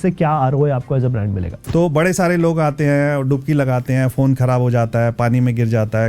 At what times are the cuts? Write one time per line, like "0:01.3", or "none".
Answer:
0:01.5

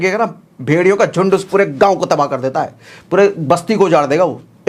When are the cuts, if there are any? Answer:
none

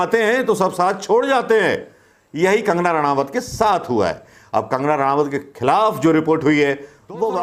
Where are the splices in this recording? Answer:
none

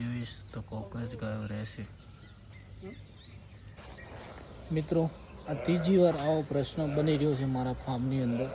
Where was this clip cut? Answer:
0:03.8

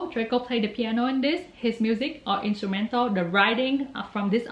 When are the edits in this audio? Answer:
none

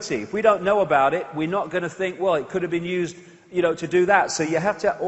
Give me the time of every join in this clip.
0:02.8

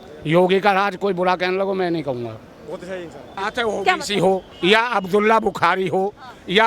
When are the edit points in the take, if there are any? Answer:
0:03.4

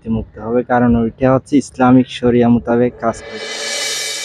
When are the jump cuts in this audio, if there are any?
0:03.3

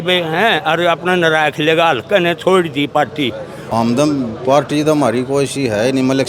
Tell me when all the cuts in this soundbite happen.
none

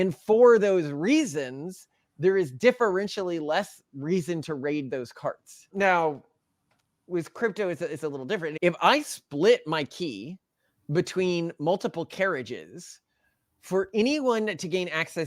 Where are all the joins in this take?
0:05.5
0:08.5

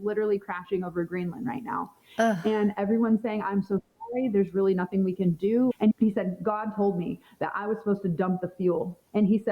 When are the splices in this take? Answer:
0:05.7

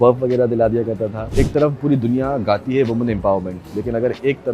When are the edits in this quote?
0:01.2

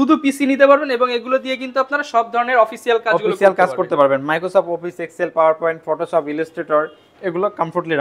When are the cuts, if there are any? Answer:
none

